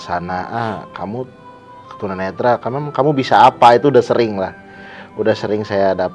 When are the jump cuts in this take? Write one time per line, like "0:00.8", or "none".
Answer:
none